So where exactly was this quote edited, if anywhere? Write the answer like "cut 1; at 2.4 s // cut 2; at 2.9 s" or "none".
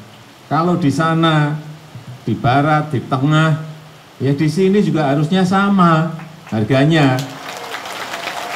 none